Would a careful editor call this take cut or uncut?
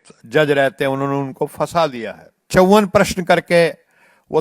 cut